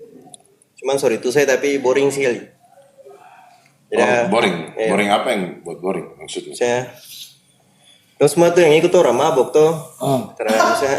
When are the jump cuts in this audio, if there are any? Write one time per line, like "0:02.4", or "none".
none